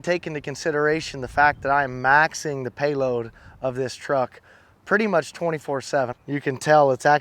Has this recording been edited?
yes; 1 cut; at 6.1 s

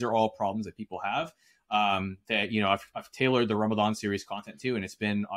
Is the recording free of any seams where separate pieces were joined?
yes; 0 cuts

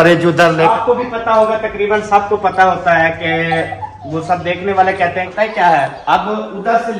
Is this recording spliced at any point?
yes; 2 cuts; at 0.7 s, 5.3 s

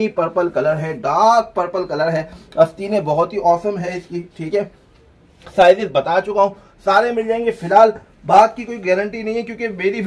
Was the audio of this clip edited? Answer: no; 0 cuts

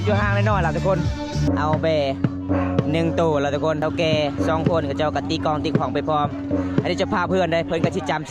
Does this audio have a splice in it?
yes; 2 cuts; at 1.4 s, 3.8 s

